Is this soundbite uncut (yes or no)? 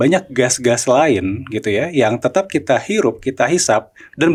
yes